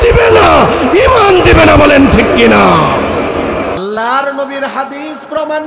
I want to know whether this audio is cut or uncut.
cut